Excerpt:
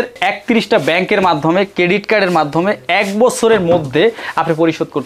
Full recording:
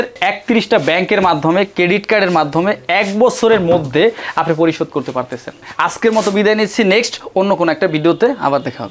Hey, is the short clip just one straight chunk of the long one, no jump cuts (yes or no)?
yes